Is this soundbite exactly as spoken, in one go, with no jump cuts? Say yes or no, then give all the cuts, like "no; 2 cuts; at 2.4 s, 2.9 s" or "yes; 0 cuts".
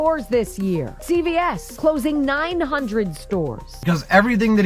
no; 3 cuts; at 0.9 s, 1.7 s, 3.7 s